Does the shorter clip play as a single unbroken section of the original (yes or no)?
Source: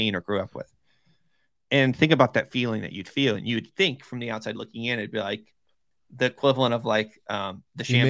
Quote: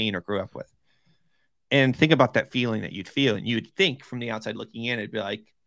yes